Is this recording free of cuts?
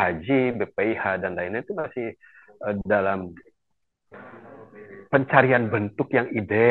yes; 0 cuts

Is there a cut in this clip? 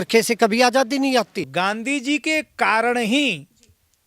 yes; 1 cut; at 1.5 s

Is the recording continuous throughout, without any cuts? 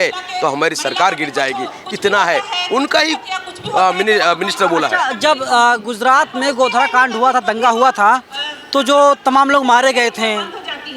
yes; 0 cuts

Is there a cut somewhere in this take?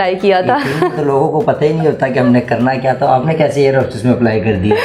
no; 0 cuts

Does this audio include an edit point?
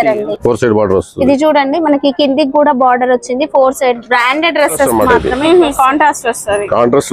yes; 1 cut; at 4.9 s

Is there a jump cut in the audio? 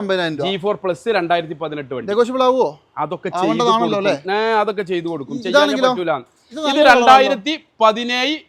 no; 0 cuts

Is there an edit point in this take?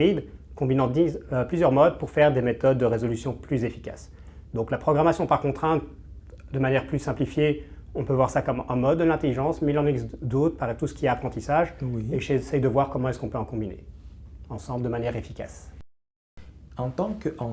yes; 1 cut; at 16.0 s

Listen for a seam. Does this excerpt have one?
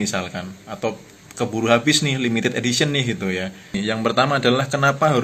yes; 1 cut; at 3.8 s

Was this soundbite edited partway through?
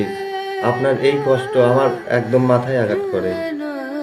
no; 0 cuts

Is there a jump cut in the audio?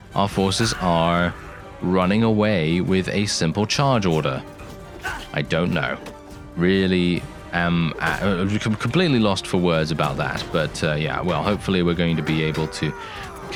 no; 0 cuts

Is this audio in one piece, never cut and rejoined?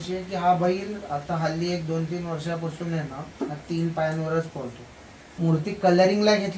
no; 1 cut; at 5.2 s

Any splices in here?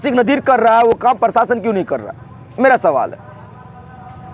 no; 0 cuts

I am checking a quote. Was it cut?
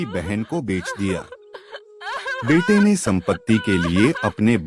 no; 0 cuts

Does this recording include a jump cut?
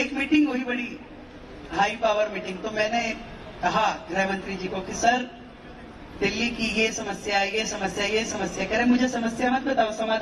no; 0 cuts

